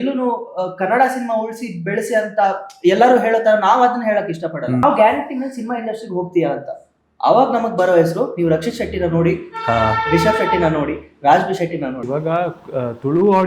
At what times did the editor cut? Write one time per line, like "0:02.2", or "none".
0:04.8
0:12.2